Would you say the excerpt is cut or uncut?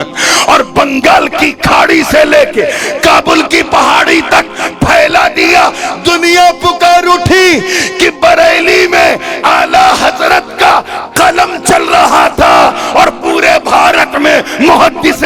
uncut